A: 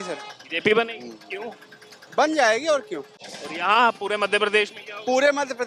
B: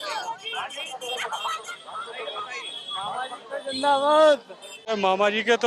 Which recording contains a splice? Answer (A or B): B